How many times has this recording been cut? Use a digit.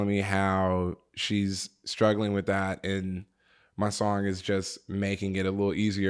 0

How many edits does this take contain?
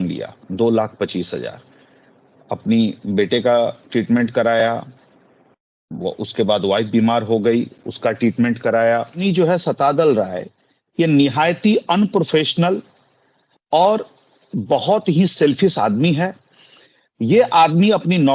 1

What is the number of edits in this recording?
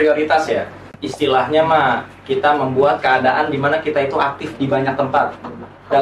1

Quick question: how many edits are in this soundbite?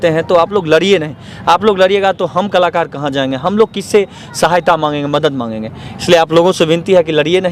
0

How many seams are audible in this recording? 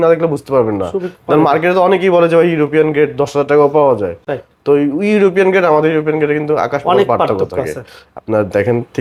0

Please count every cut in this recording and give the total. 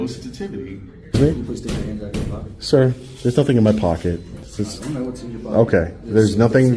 1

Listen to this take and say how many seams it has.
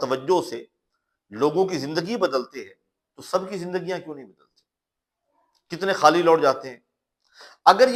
0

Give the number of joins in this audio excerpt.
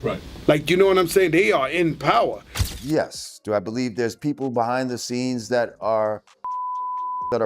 1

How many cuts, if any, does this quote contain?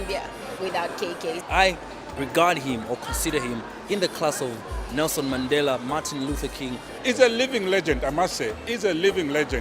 2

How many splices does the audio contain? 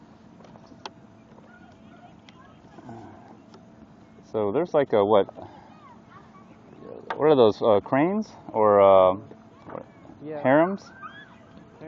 0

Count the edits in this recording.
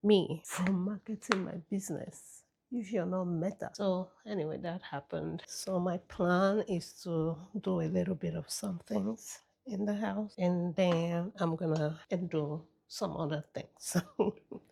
0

